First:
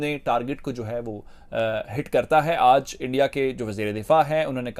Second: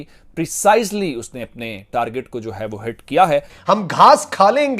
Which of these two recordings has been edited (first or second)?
second